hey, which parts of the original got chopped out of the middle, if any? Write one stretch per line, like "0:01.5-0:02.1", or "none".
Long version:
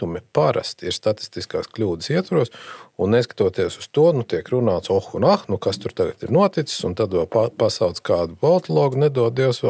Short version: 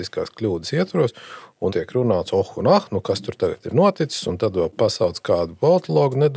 0:03.1-0:04.3
0:07.3-0:07.5